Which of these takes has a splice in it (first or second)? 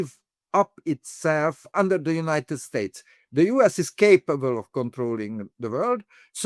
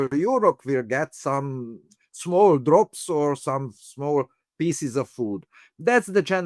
first